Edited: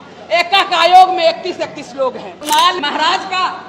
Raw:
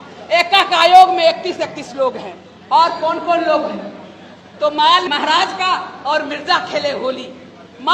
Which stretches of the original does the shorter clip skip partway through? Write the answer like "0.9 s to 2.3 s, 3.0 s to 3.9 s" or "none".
2.5 s to 4.7 s